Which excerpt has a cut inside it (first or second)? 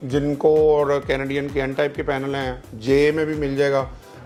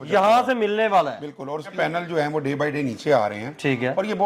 second